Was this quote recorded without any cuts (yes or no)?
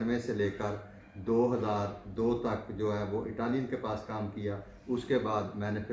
yes